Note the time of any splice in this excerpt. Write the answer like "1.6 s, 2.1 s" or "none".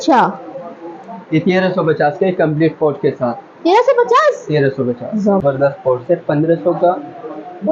5.4 s